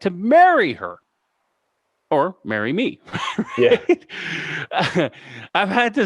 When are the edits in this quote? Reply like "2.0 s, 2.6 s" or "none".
none